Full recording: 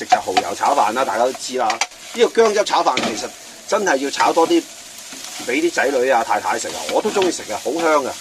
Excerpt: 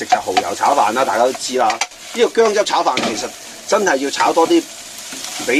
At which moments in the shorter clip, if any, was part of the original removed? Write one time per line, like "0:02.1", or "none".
none